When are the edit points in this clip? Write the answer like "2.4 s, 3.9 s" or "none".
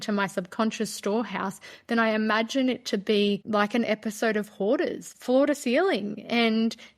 3.4 s, 5.1 s